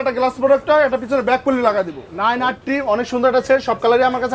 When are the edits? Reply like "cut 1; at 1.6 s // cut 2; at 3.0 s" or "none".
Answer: cut 1; at 2.0 s